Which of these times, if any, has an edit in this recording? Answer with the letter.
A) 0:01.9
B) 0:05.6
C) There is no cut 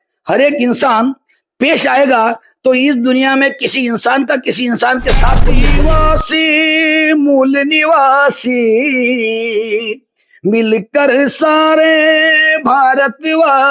B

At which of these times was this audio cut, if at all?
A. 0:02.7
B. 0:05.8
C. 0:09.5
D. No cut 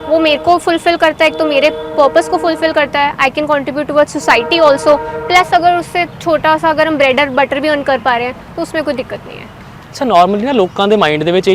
D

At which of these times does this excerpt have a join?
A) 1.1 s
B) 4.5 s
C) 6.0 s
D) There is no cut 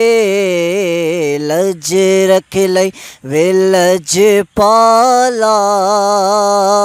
D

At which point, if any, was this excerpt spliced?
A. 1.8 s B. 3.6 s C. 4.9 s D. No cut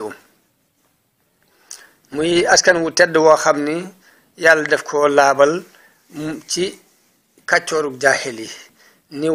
C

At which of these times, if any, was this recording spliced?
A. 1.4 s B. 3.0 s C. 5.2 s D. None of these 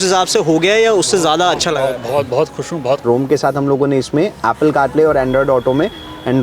B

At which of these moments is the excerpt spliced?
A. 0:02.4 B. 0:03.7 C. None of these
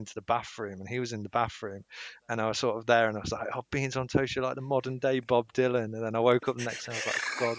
C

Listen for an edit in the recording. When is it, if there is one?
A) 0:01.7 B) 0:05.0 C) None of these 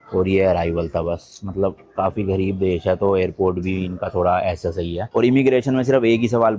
B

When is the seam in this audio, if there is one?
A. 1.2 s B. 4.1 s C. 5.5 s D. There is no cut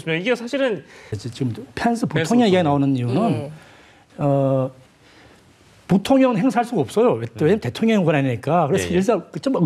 A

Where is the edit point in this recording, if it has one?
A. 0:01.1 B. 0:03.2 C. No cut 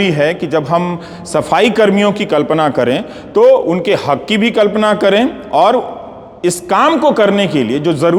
C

